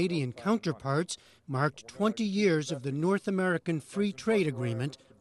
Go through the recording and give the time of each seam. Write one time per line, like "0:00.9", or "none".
none